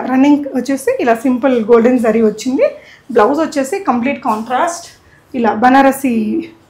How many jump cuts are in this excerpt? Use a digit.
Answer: 0